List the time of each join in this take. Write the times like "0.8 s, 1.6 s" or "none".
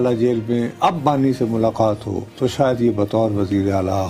none

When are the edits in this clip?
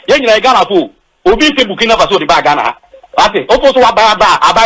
none

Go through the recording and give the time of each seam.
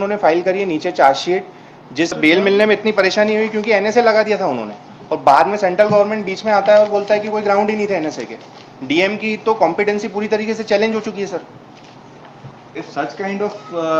2.2 s, 12.7 s

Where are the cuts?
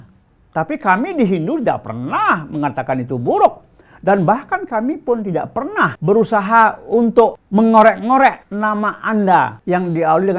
6.0 s, 7.4 s, 8.5 s, 9.6 s

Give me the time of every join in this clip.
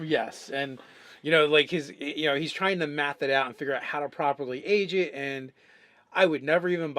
4.9 s

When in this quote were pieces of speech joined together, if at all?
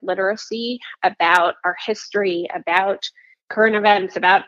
none

